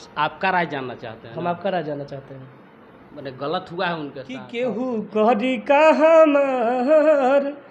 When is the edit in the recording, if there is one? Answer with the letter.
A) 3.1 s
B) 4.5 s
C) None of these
B